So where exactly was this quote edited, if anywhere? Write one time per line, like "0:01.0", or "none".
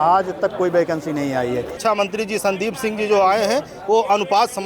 0:01.7